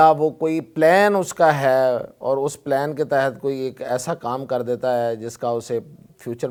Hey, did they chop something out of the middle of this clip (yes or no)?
no